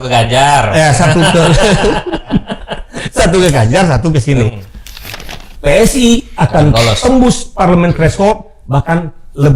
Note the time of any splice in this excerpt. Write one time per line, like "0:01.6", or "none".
0:05.0